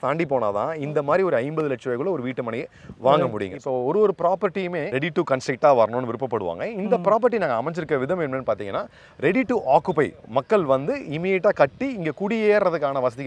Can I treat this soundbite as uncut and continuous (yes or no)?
no